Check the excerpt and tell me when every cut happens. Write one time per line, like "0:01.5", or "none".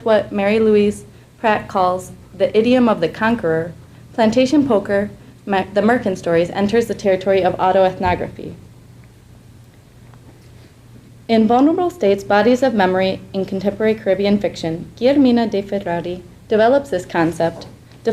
0:04.8